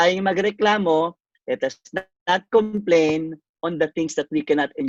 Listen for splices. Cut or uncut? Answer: uncut